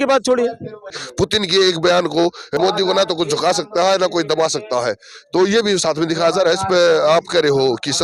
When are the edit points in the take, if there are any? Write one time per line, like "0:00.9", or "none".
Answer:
0:01.0
0:02.5